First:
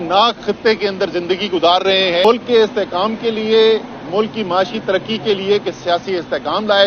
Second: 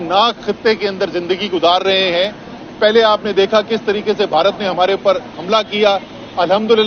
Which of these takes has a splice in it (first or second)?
first